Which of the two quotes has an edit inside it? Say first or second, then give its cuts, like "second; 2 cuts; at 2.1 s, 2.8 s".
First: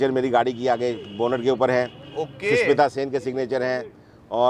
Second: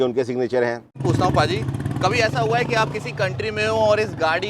second; 1 cut; at 1.0 s